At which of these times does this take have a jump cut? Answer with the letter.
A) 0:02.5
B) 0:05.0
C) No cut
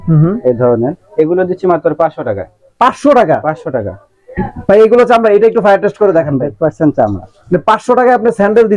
C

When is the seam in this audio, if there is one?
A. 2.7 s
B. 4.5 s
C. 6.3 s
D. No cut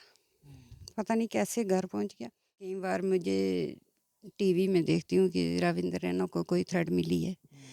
A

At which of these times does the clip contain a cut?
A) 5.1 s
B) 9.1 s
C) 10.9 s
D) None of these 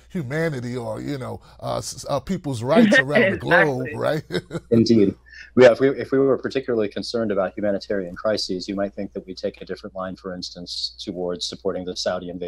D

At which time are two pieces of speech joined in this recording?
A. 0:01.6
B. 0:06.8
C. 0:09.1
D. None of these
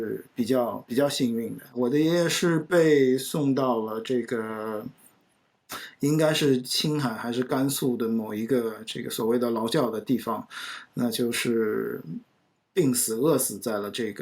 A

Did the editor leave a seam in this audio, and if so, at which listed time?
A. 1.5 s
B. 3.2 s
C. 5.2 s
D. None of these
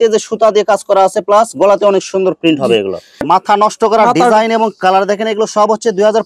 B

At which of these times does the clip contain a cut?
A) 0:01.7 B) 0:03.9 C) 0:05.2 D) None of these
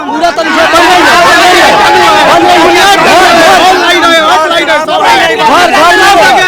D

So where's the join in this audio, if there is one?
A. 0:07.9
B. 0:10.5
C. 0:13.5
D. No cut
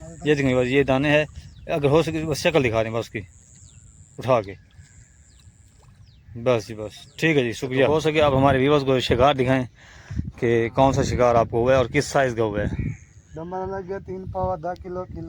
A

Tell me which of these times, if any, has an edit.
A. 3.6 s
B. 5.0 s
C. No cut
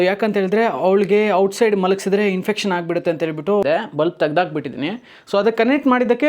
A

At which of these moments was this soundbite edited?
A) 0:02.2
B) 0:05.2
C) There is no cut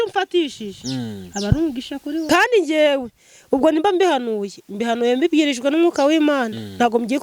A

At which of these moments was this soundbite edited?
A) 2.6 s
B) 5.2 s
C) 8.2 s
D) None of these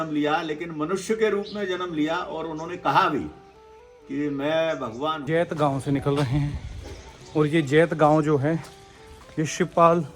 B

